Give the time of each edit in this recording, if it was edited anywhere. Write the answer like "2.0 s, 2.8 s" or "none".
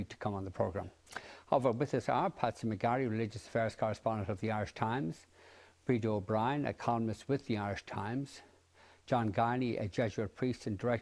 3.6 s